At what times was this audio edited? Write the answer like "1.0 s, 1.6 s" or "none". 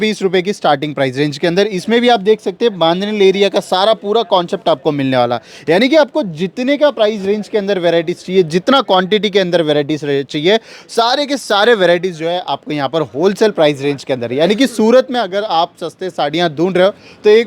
none